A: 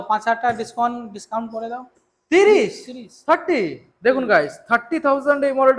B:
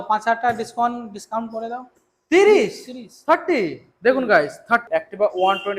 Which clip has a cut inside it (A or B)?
B